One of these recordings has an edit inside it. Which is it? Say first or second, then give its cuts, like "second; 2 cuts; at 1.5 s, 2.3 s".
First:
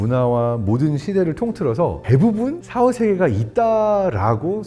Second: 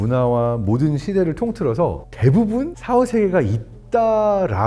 first; 2 cuts; at 2.0 s, 3.4 s